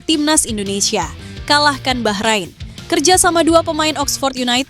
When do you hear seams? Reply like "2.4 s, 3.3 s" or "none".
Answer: none